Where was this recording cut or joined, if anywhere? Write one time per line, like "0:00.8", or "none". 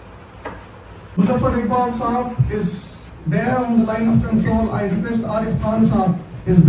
0:01.2